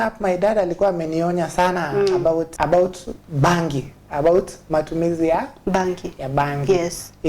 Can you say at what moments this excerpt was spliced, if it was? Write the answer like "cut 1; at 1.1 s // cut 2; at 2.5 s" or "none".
cut 1; at 2.5 s